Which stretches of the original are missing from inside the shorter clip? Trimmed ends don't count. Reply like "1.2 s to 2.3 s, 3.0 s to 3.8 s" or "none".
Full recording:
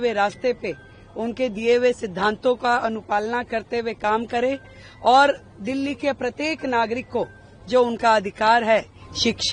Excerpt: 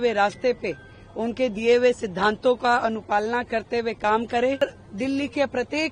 4.6 s to 5.3 s

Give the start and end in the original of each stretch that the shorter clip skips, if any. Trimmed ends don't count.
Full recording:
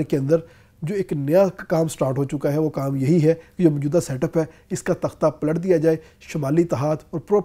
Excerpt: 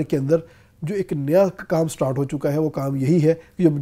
none

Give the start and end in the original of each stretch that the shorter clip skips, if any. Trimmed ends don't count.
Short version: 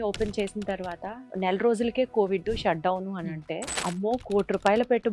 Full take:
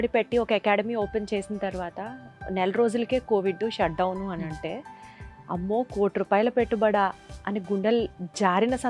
2.1 s to 2.3 s, 4.8 s to 5.4 s

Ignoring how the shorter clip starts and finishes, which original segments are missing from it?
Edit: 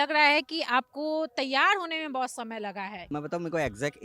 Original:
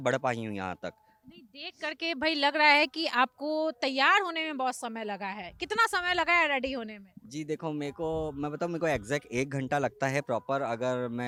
5.5 s to 8.4 s

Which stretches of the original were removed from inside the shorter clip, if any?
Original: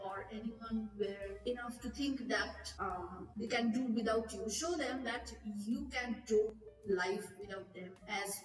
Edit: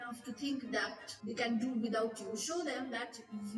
2.6 s to 3.2 s

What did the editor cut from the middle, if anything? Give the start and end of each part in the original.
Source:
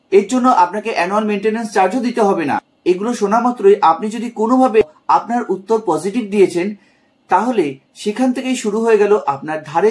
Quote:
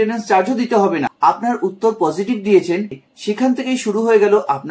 2.6 s to 5.0 s, 6.9 s to 7.9 s

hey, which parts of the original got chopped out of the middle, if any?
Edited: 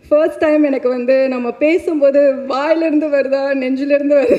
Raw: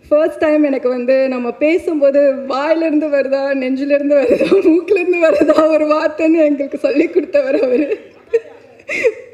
none

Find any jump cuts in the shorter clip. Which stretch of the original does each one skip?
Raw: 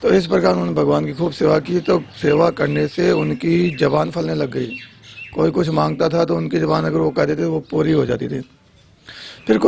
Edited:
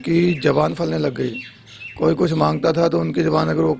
none

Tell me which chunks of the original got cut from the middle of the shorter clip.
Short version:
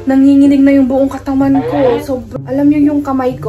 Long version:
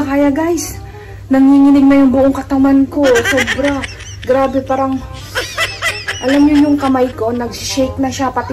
3.5 s to 6.0 s

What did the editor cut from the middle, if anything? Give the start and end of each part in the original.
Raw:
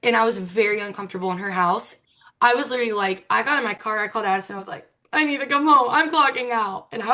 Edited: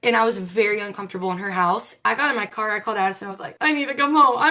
2.0 s to 3.2 s, 4.7 s to 4.9 s

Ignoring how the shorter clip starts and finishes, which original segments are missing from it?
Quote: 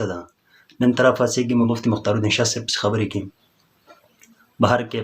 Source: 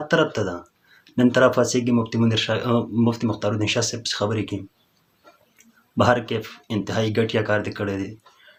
2.0 s to 3.0 s

